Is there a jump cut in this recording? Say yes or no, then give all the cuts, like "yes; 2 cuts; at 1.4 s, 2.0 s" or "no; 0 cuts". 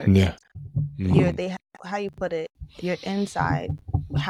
no; 0 cuts